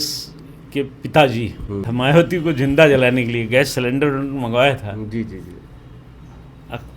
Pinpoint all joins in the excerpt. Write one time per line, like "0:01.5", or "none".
0:01.9